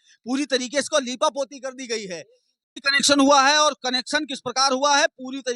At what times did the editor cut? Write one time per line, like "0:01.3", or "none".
0:02.7